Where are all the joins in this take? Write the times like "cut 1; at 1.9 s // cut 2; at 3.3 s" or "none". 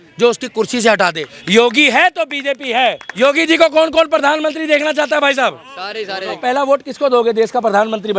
cut 1; at 1.3 s // cut 2; at 3.1 s // cut 3; at 6.4 s